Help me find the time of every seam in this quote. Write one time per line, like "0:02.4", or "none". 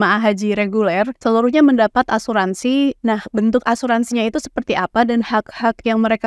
0:01.2
0:03.0